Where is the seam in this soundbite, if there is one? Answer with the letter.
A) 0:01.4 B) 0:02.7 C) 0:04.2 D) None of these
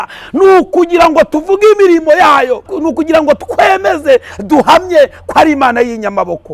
B